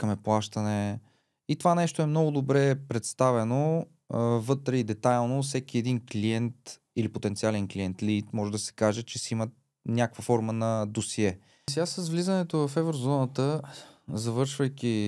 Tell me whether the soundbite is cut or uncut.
cut